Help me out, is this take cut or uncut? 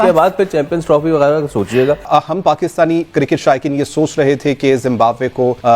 cut